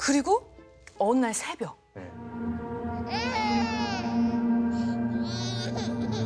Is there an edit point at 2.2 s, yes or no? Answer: yes